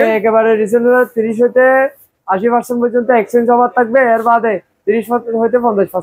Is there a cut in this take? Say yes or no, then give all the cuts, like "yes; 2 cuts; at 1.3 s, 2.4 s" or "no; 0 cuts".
no; 0 cuts